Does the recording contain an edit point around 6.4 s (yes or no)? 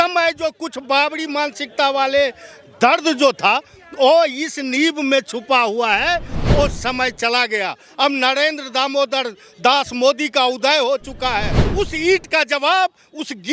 yes